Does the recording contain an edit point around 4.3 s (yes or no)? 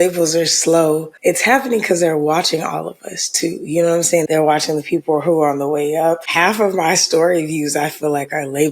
yes